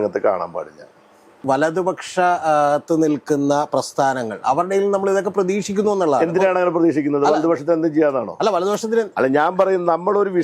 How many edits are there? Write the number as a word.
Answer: one